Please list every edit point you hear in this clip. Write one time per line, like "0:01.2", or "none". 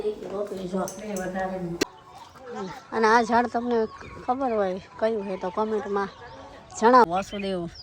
0:01.8
0:07.0